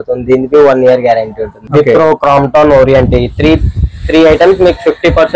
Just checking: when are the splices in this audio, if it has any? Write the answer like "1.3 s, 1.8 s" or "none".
1.6 s